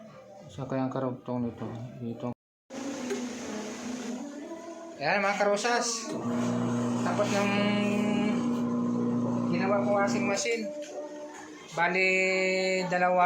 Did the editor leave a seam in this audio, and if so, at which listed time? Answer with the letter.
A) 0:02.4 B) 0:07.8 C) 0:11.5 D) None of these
A